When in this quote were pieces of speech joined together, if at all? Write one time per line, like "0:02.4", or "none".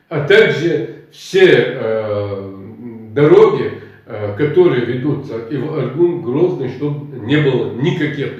none